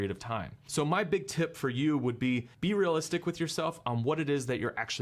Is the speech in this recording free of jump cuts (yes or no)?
yes